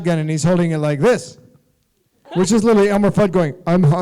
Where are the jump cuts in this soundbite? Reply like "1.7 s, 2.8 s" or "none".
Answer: 2.1 s